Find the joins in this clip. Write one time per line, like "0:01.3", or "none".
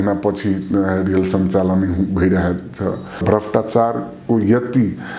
0:03.2